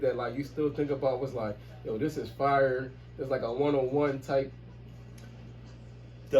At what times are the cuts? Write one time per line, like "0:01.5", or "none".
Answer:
none